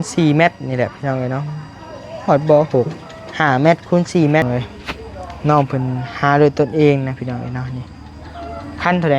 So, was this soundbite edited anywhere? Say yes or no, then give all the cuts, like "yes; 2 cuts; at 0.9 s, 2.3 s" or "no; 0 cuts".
yes; 1 cut; at 4.4 s